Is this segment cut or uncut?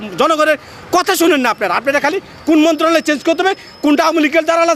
uncut